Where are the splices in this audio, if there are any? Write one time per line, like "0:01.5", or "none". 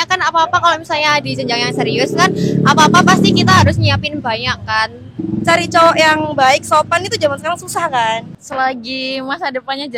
0:05.1
0:08.4